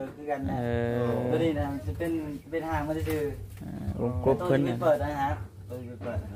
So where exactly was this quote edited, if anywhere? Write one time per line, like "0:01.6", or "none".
none